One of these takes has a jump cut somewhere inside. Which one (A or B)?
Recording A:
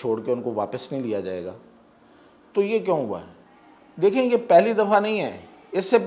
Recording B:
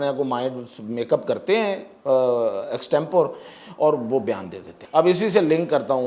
B